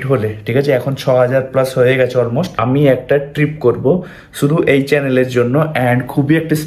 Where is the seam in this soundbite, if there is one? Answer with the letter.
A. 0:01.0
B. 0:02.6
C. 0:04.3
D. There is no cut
B